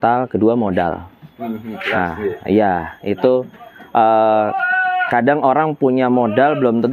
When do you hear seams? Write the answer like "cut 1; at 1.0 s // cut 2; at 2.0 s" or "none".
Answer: none